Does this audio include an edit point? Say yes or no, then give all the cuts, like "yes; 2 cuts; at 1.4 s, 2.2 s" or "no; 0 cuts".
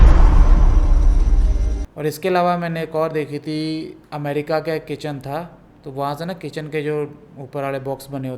no; 0 cuts